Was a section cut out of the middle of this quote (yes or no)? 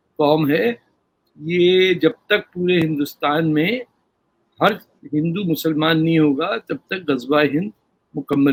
no